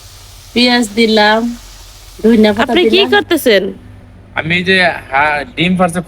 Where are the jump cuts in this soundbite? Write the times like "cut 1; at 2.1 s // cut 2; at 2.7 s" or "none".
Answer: cut 1; at 2.7 s